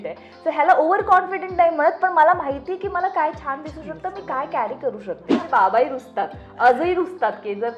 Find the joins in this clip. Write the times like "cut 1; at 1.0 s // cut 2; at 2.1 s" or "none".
cut 1; at 5.4 s